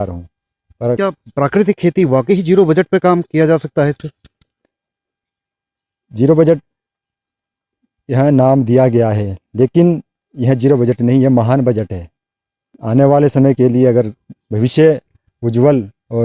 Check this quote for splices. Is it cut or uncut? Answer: cut